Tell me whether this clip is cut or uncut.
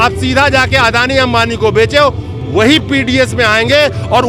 uncut